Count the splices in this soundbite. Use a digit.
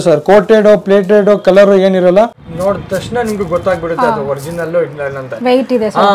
1